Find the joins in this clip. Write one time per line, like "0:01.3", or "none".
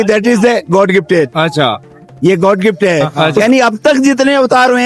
0:03.4